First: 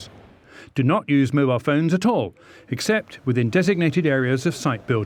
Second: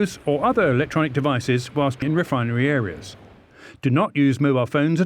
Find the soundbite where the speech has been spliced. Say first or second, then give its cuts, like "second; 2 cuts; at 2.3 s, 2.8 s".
second; 1 cut; at 2.0 s